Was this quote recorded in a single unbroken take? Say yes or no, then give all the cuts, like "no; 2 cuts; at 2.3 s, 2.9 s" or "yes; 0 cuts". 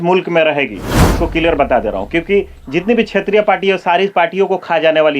no; 1 cut; at 1.2 s